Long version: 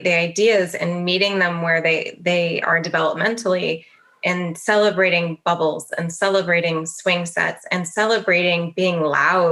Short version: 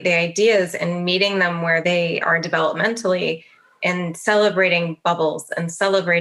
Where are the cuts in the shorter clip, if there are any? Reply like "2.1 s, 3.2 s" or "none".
1.8 s